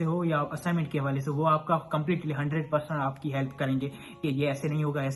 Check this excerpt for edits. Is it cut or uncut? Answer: uncut